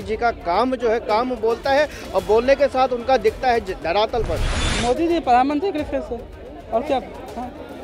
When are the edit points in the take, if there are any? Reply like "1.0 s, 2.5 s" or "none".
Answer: 4.5 s

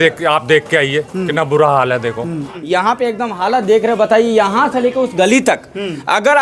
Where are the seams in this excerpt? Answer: 2.5 s

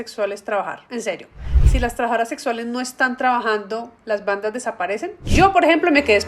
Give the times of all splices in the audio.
5.2 s

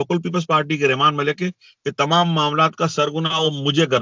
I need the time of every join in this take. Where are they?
none

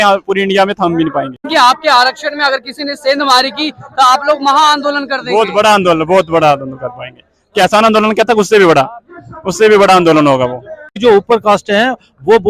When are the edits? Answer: 1.5 s, 10.9 s

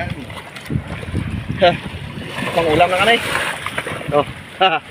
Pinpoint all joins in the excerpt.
none

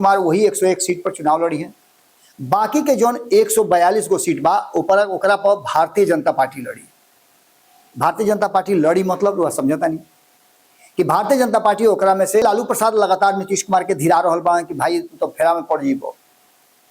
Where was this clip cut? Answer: 12.4 s

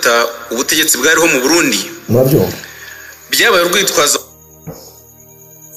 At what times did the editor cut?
none

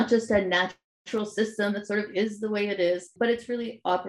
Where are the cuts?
3.1 s

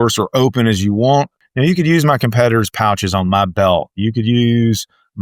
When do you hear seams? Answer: 1.4 s

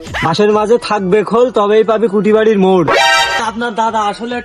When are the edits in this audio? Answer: 3.4 s

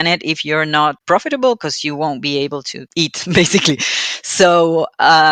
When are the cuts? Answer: 1.0 s, 2.8 s

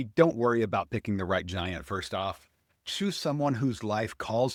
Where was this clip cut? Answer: none

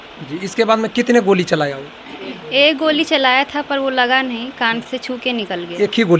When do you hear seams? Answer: none

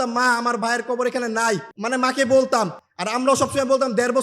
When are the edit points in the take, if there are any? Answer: 1.7 s

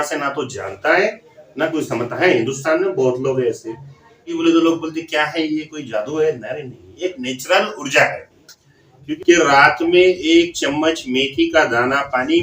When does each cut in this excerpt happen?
4.4 s, 9.2 s

